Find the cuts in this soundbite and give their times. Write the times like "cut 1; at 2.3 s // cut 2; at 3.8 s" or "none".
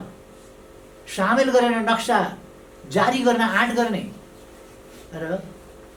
none